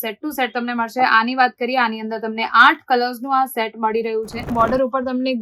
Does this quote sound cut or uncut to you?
cut